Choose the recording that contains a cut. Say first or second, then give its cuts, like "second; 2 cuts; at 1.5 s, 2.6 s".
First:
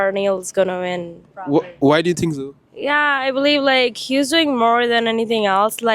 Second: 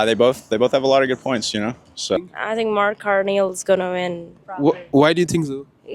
second; 1 cut; at 2.2 s